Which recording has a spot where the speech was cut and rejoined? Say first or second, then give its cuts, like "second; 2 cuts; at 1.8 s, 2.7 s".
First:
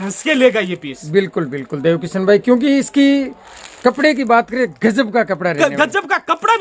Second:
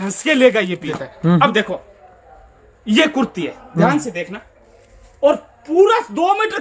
second; 1 cut; at 1.0 s